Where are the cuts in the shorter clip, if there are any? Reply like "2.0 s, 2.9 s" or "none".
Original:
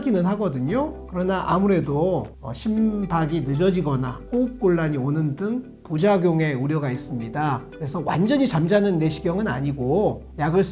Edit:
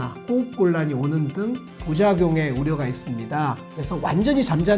none